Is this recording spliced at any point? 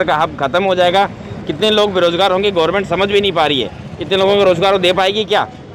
no; 0 cuts

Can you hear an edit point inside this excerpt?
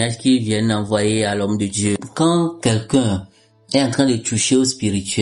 yes; 1 cut; at 2.0 s

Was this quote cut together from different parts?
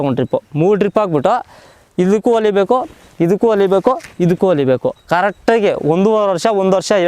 no; 0 cuts

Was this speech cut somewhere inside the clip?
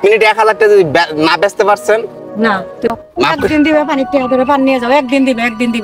yes; 1 cut; at 2.9 s

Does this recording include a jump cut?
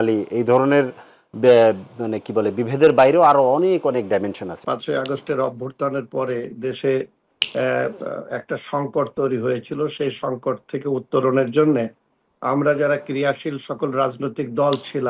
yes; 1 cut; at 4.6 s

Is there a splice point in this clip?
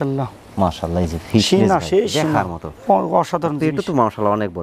no; 0 cuts

